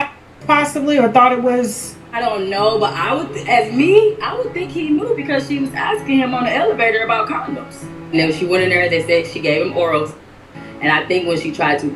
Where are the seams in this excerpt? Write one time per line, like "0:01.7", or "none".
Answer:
none